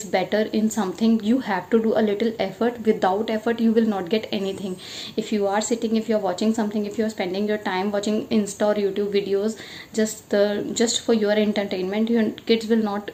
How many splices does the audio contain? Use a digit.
0